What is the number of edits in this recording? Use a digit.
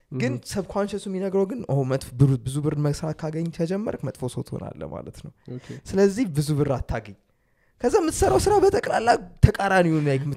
0